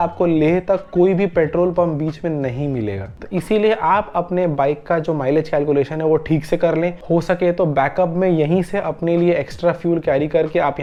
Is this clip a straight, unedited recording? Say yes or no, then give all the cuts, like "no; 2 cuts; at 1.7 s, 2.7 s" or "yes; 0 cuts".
yes; 0 cuts